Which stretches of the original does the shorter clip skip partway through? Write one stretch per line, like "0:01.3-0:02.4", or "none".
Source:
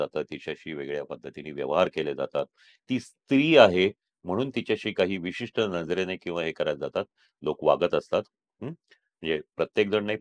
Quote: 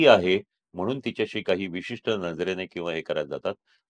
none